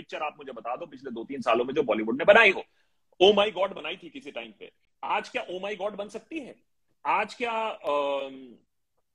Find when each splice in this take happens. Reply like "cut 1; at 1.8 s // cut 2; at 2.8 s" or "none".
none